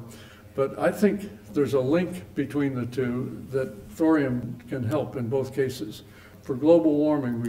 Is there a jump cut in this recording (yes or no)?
yes